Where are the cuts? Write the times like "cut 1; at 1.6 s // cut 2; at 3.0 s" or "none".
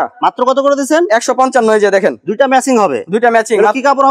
none